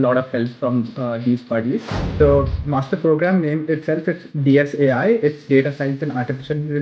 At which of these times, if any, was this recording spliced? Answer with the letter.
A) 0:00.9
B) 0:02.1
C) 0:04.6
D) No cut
B